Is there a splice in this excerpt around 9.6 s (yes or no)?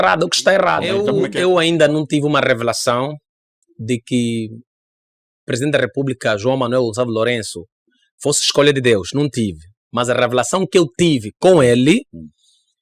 no